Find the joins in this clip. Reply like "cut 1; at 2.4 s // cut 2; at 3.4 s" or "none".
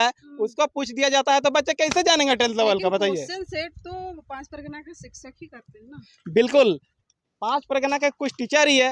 none